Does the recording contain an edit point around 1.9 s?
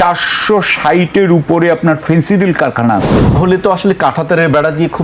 no; 1 cut; at 3.4 s

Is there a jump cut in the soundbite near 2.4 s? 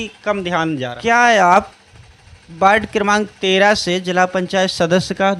no; 1 cut; at 0.9 s

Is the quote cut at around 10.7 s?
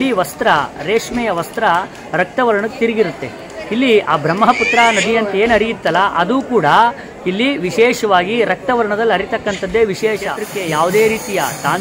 yes; 1 cut; at 10.7 s

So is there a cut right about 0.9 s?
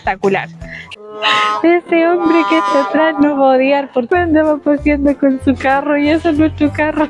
yes; 2 cuts; at 0.9 s, 4.1 s

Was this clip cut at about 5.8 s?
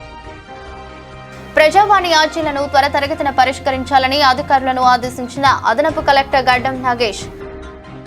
no; 1 cut; at 1.1 s

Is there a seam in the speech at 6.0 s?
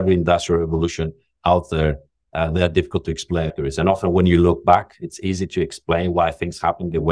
no; 1 cut; at 3.5 s

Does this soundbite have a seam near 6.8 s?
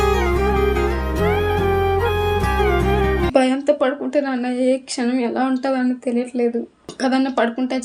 yes; 1 cut; at 6.8 s

